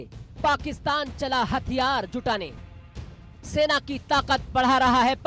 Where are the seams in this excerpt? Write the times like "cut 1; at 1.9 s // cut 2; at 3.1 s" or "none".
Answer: none